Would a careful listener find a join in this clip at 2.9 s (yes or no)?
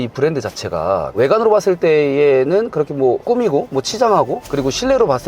no